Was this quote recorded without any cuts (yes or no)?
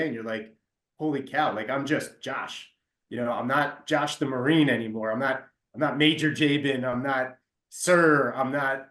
yes